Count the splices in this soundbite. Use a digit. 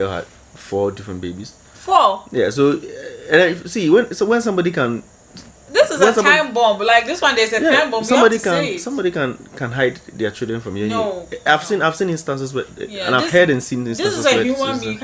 0